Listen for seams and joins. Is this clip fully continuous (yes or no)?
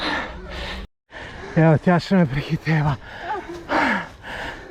no